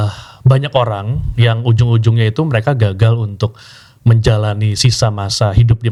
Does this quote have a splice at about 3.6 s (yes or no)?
no